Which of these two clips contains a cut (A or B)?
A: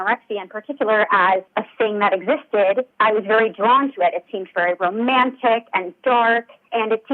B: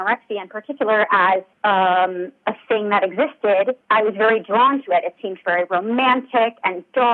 A